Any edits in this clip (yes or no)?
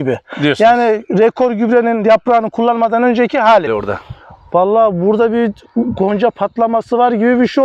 yes